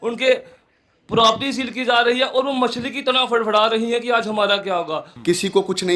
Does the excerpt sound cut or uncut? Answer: cut